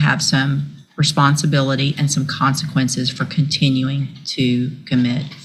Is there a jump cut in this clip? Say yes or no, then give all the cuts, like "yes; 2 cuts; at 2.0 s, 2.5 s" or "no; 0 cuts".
no; 0 cuts